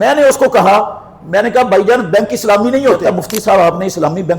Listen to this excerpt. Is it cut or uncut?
cut